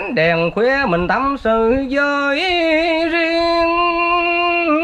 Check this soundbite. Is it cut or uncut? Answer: uncut